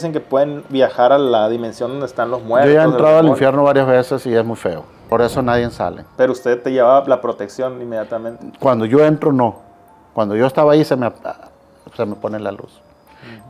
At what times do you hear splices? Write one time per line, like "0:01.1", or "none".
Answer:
0:04.9
0:06.0